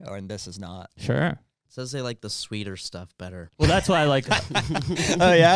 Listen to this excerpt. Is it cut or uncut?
cut